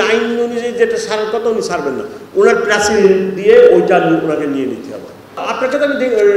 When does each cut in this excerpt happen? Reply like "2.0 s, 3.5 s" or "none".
5.4 s